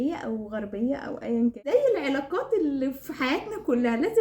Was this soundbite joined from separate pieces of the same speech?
yes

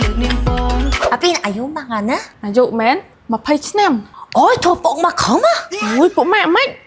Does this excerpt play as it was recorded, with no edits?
no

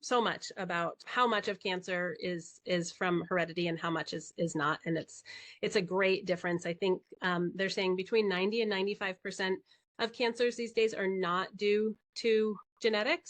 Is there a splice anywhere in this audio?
yes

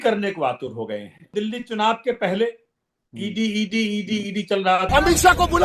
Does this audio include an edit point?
yes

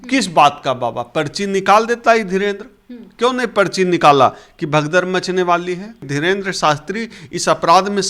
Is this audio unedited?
no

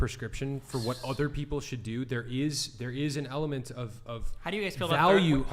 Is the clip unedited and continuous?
yes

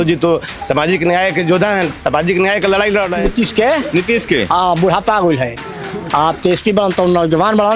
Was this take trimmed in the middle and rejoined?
yes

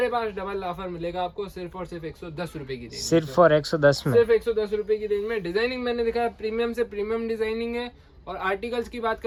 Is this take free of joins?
yes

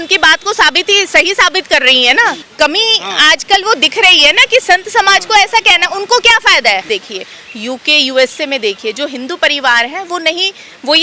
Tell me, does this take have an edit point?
yes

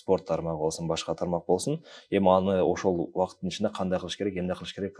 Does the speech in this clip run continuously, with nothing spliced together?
yes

